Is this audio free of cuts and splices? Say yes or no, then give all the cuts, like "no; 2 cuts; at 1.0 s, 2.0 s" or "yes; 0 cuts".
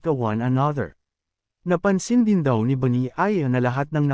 yes; 0 cuts